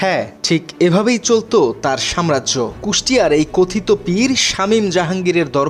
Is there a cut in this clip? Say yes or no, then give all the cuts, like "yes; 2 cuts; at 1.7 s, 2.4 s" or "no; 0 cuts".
no; 0 cuts